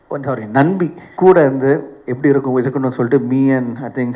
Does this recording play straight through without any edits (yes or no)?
no